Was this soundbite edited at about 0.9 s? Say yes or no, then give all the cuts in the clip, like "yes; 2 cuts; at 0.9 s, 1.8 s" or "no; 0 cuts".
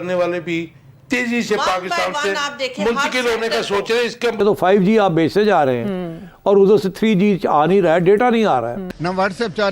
no; 2 cuts; at 4.4 s, 8.9 s